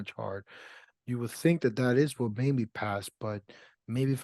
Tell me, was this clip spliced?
no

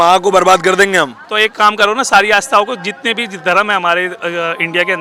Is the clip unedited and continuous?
yes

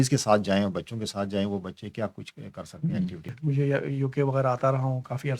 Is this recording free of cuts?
no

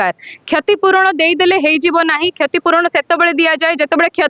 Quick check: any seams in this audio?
no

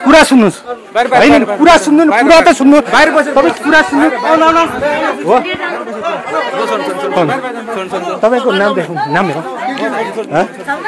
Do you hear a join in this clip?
no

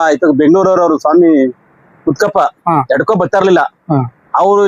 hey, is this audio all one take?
yes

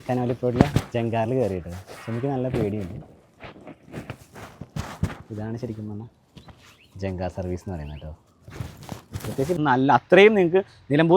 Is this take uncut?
no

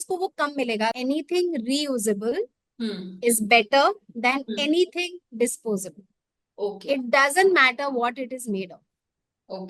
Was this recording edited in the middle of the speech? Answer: yes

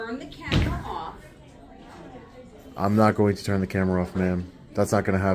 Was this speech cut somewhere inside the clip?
no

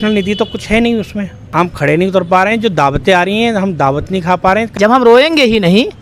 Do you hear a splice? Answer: yes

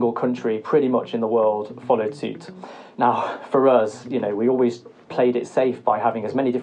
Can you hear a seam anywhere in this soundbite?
yes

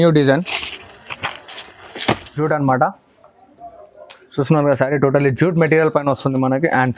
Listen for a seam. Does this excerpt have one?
yes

